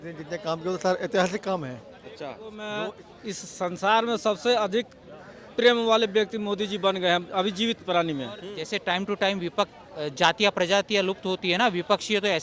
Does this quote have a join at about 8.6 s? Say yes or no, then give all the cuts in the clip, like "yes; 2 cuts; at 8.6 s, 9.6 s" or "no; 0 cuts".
yes; 2 cuts; at 2.6 s, 8.6 s